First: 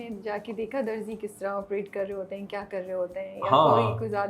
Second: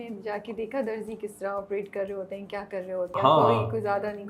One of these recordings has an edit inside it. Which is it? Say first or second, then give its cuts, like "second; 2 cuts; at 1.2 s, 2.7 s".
second; 1 cut; at 3.1 s